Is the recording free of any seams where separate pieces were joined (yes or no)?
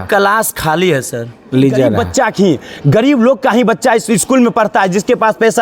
no